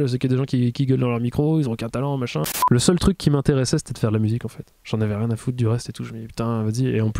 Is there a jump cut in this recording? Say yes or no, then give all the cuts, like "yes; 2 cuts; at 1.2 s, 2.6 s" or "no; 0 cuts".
yes; 1 cut; at 2.4 s